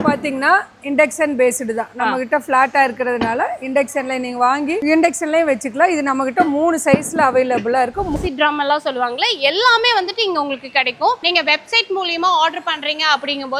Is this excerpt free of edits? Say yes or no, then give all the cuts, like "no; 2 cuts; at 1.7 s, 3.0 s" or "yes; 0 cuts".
no; 2 cuts; at 8.2 s, 11.2 s